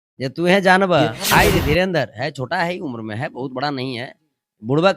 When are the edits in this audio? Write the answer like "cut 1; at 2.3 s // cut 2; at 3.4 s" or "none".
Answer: cut 1; at 1.2 s